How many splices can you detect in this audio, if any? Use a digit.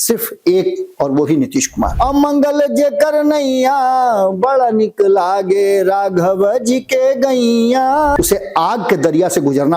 2